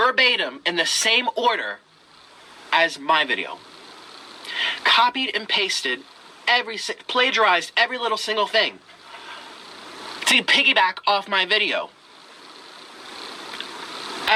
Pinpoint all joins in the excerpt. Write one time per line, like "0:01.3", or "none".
none